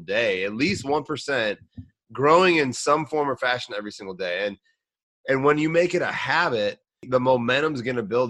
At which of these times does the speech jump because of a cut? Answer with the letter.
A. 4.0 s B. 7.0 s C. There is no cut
B